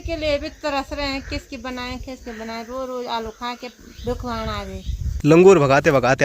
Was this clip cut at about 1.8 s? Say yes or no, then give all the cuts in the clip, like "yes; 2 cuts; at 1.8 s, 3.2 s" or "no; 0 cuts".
no; 1 cut; at 5.0 s